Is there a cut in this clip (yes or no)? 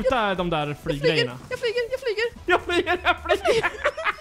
yes